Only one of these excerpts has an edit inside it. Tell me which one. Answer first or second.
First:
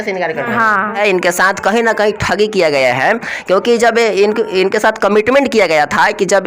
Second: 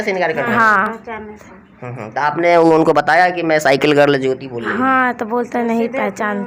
first